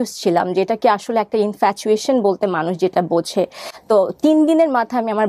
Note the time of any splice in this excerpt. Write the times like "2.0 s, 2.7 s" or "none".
3.7 s